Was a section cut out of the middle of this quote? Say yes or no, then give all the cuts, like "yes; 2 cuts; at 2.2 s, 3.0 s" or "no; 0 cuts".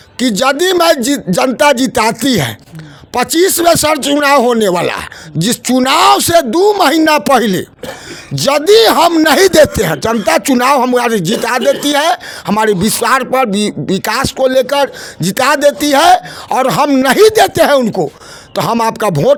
no; 0 cuts